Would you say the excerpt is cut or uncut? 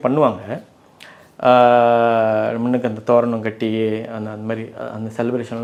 uncut